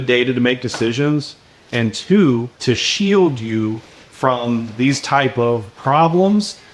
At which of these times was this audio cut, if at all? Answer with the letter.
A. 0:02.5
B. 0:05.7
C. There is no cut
A